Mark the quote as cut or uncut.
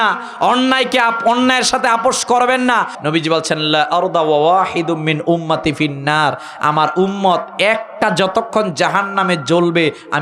cut